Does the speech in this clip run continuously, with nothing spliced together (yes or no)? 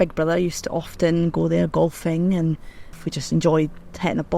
no